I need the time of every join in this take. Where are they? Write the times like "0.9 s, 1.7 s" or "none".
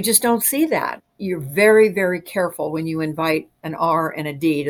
none

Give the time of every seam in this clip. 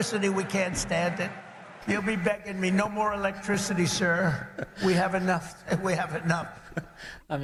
none

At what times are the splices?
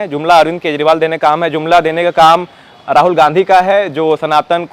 none

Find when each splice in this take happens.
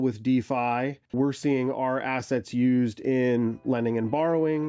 1.0 s

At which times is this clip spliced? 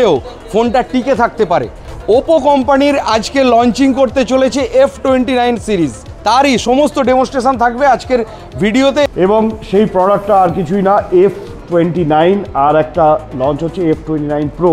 1.8 s, 9.1 s

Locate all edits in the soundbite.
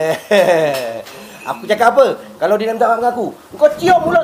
none

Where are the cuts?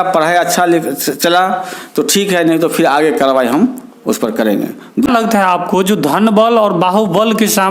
5.1 s

